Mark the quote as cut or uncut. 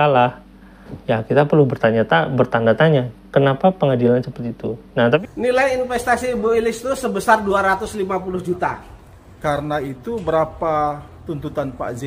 cut